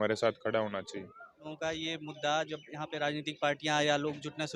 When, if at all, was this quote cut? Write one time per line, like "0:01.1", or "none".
0:01.4

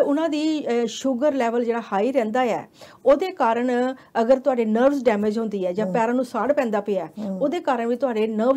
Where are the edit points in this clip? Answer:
none

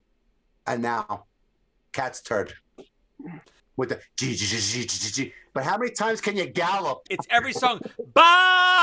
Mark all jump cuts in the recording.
0:03.6
0:07.1

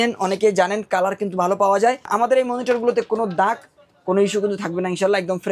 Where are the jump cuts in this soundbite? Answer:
0:02.1

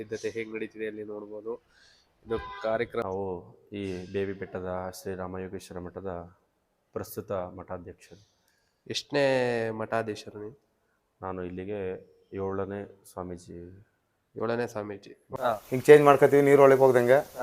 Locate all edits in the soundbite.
0:03.0
0:15.3

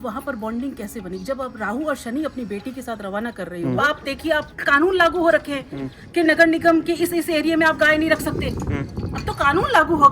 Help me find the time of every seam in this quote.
0:03.8

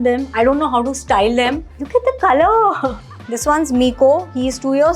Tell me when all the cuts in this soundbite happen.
0:01.7
0:03.1

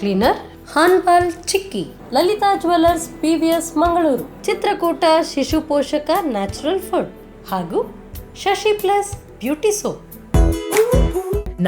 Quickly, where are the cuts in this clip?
0:10.1

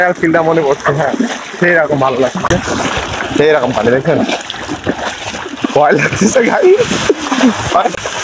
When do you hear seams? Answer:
none

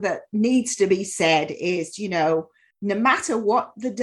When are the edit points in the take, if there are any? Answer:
0:02.6

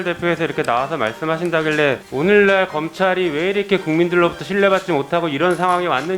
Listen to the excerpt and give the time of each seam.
0:02.1

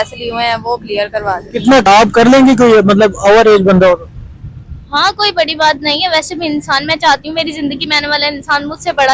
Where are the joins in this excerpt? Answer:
0:01.7

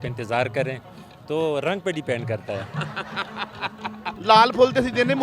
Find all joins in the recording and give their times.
0:04.1

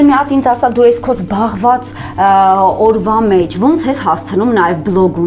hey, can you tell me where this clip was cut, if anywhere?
none

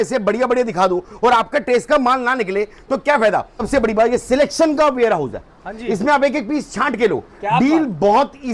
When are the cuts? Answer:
0:03.7

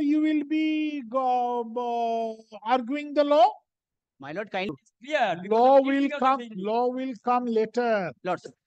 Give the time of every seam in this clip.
0:04.7

